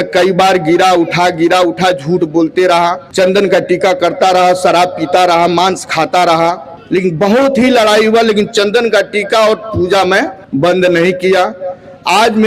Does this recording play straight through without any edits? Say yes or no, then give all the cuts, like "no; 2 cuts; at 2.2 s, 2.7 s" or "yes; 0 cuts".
no; 3 cuts; at 3.0 s, 6.7 s, 10.4 s